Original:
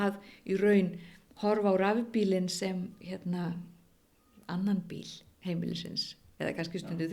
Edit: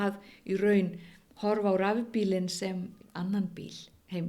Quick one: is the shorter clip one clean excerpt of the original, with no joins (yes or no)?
no